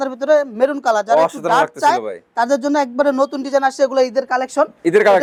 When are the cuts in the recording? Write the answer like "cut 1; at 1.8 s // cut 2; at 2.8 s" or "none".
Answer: none